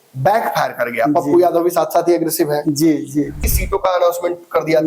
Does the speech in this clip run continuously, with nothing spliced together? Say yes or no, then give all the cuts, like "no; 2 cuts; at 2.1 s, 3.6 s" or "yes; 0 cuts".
no; 1 cut; at 3.4 s